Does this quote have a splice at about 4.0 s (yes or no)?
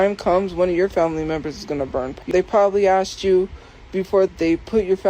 no